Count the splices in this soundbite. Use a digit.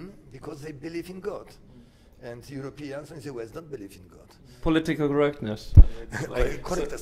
1